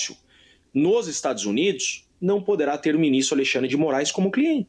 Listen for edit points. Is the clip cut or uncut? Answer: uncut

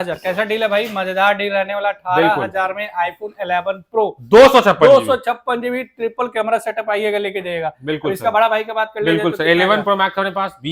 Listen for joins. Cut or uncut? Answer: uncut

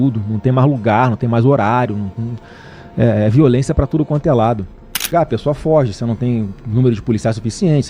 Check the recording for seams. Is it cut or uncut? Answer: cut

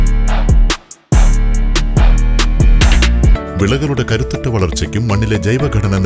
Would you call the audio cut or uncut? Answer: cut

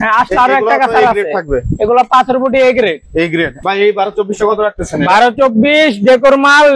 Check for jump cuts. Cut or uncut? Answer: cut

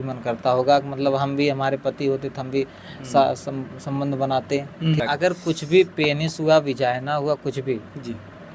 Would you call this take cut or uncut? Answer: cut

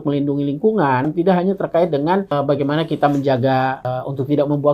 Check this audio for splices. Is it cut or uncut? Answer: cut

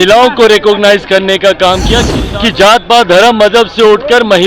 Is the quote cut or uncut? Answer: cut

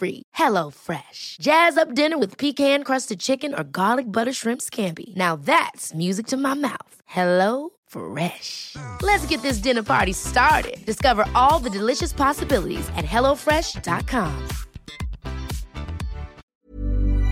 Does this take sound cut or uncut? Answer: cut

